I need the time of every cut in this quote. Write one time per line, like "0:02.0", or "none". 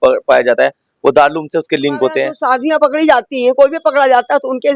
0:02.3